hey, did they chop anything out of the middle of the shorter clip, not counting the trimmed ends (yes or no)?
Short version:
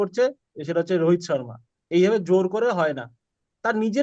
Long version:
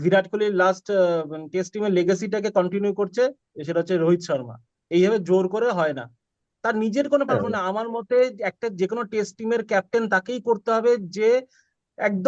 no